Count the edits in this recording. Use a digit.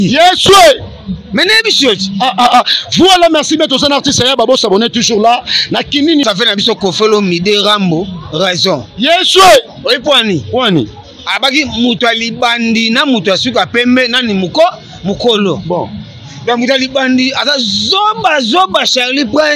1